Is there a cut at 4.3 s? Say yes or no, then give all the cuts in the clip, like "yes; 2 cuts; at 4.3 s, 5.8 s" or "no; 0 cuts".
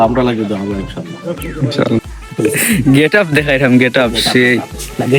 no; 1 cut; at 2.2 s